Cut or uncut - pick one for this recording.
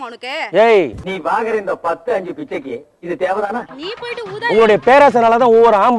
cut